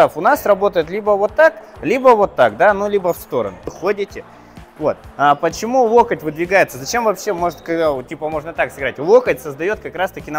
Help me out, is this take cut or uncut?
cut